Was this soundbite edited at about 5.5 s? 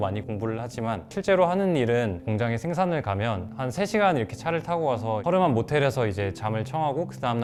no; 0 cuts

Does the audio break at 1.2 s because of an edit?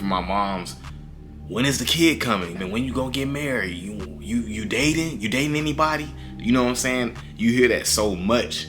no; 1 cut; at 2.6 s

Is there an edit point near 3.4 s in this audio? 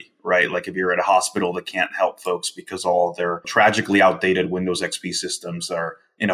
yes; 1 cut; at 3.4 s

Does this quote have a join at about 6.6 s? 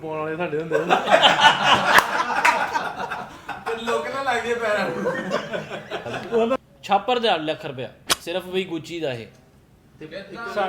yes; 1 cut; at 6.6 s

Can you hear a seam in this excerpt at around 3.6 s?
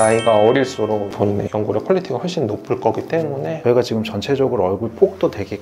yes; 1 cut; at 3.6 s

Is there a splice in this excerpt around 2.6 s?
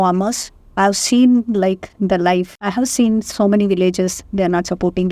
yes; 1 cut; at 2.6 s

